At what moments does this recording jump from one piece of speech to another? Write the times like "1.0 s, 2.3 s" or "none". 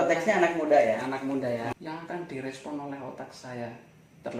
1.7 s